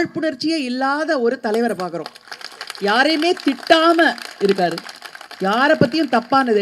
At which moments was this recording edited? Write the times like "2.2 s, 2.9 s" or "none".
none